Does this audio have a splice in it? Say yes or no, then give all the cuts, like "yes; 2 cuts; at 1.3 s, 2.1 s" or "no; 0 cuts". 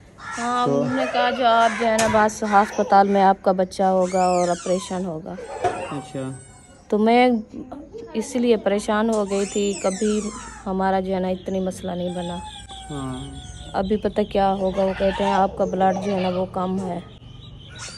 no; 0 cuts